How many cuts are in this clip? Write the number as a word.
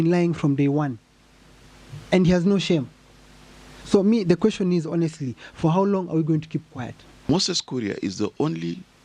one